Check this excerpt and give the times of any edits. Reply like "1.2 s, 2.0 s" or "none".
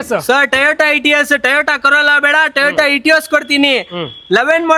none